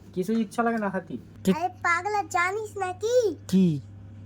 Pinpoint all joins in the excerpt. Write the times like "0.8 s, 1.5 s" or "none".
1.2 s